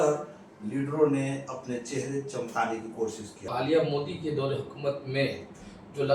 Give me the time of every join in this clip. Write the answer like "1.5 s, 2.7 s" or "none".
3.5 s